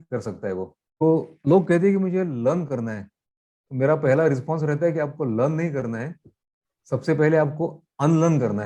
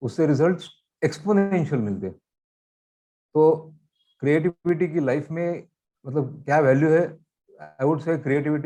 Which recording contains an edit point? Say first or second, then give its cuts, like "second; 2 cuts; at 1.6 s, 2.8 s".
first; 1 cut; at 1.0 s